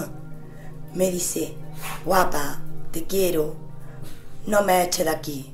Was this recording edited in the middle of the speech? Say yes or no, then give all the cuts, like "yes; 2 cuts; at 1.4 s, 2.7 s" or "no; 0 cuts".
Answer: no; 0 cuts